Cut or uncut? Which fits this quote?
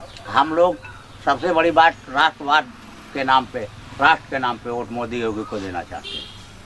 uncut